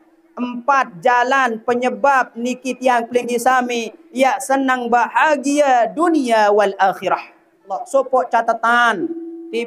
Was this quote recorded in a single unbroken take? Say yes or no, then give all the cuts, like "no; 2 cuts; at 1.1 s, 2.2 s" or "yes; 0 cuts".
no; 1 cut; at 7.8 s